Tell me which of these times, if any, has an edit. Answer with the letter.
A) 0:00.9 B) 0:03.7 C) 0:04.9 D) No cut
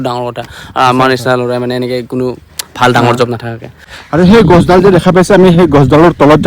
B